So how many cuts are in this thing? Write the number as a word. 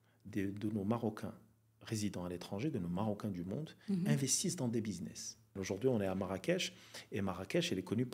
one